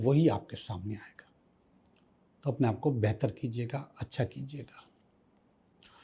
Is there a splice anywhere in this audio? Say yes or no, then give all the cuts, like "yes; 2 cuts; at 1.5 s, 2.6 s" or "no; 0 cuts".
no; 0 cuts